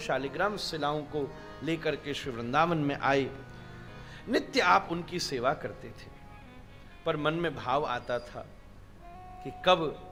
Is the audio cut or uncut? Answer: uncut